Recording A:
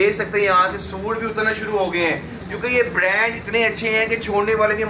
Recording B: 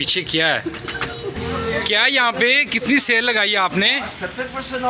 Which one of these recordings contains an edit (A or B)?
B